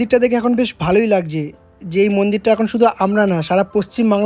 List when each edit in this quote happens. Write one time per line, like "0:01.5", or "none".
none